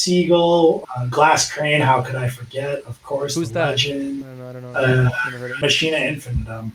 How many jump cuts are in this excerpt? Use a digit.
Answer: 2